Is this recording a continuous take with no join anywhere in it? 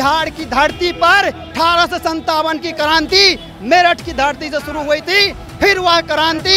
no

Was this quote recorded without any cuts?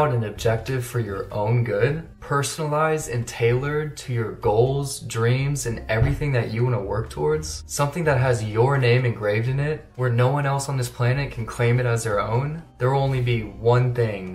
yes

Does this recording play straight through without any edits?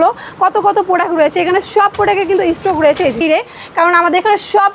no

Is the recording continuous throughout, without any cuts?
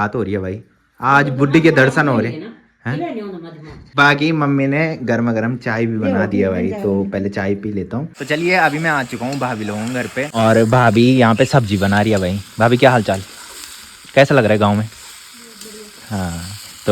yes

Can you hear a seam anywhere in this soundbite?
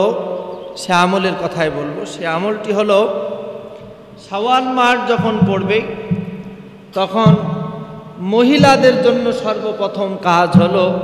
no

